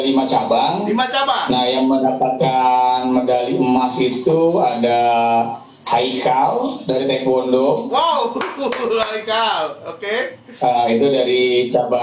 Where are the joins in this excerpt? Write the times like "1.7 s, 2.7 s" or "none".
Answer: none